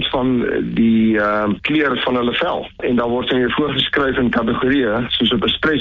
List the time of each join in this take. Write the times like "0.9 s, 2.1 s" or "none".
1.6 s, 2.8 s